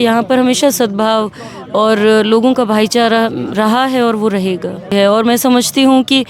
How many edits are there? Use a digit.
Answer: 1